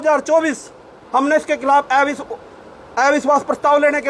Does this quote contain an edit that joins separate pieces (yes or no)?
no